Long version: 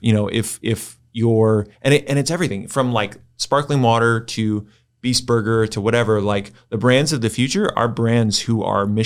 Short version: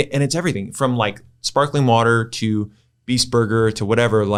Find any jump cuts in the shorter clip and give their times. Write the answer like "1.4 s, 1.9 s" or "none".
none